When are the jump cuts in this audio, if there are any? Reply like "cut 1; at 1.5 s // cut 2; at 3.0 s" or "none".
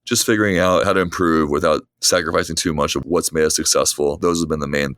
cut 1; at 0.8 s // cut 2; at 1.9 s // cut 3; at 3.0 s // cut 4; at 4.2 s